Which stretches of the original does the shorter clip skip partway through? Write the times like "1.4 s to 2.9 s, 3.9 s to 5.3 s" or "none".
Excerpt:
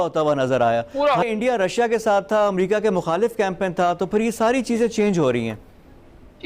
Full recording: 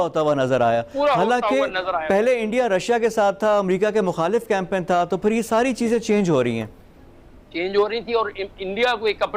1.2 s to 2.4 s